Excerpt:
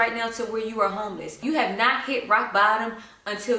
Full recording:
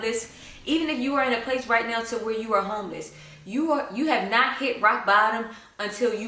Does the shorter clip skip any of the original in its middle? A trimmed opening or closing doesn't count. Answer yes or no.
yes